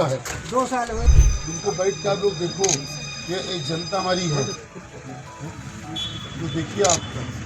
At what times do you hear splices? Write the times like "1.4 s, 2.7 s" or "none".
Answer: 1.1 s

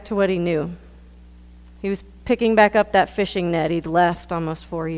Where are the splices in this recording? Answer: none

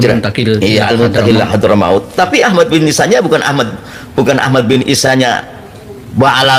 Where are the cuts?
none

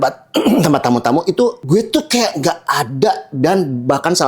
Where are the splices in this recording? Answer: 1.6 s

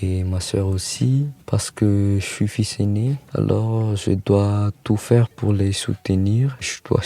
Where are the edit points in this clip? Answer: 1.4 s, 3.2 s, 5.3 s

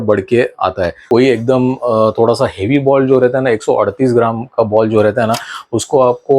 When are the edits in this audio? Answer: 1.0 s

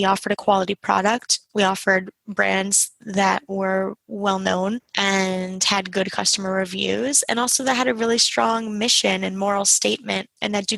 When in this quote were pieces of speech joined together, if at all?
4.9 s

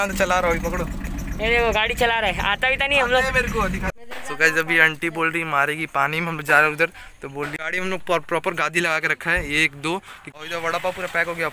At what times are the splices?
3.9 s, 7.5 s, 10.2 s

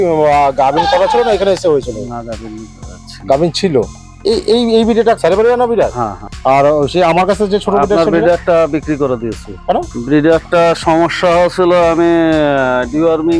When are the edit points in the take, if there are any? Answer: 4.0 s, 5.2 s, 6.2 s

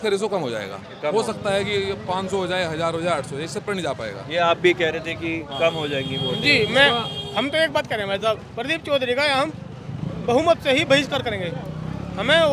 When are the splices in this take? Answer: none

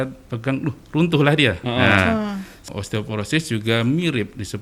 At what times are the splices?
2.6 s

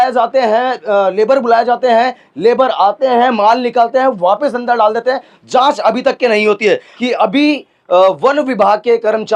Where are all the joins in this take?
6.9 s

